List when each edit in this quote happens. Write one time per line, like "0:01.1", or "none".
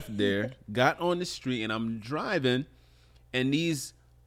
none